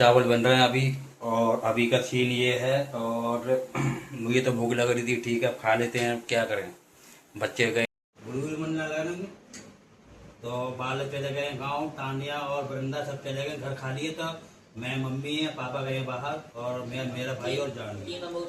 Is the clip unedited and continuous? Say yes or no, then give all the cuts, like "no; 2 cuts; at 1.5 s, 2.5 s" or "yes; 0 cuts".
no; 1 cut; at 7.9 s